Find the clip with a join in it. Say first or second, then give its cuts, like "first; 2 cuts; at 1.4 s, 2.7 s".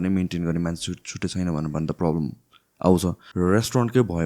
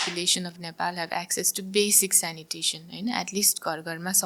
first; 1 cut; at 3.2 s